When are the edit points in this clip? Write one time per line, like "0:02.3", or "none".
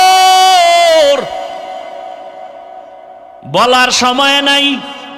none

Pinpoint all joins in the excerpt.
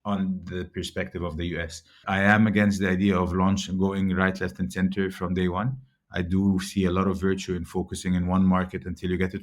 0:01.9

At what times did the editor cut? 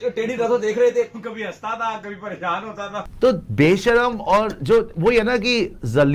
0:03.1

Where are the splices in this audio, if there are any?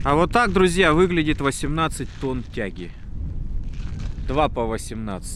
none

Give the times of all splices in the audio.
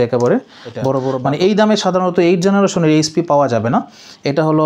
0:01.2

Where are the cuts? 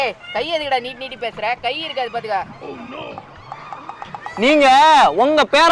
none

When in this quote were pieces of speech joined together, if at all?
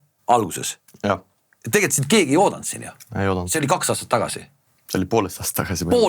none

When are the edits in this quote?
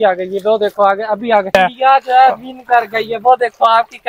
0:01.5

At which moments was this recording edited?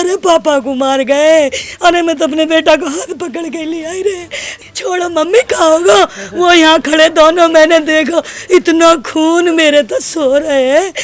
0:04.5

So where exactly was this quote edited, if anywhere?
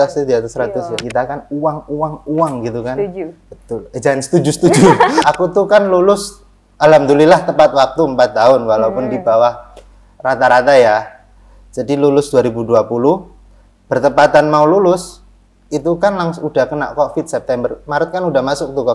0:01.0
0:05.2

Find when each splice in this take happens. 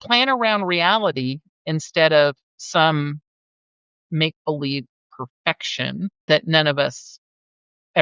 0:06.2

